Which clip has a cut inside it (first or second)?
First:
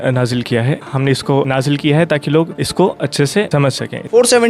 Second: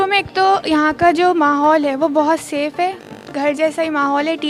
first